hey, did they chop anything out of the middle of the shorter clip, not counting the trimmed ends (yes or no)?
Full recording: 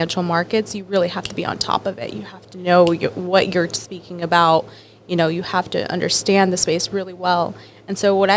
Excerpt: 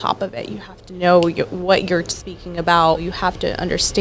yes